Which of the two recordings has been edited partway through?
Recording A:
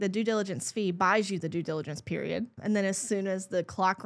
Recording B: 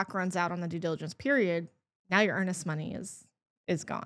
A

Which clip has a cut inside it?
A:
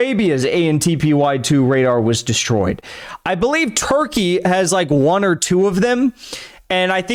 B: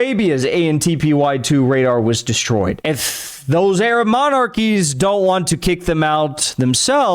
B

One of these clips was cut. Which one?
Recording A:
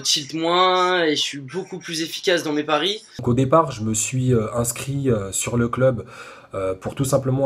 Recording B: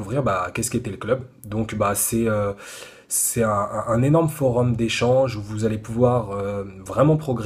A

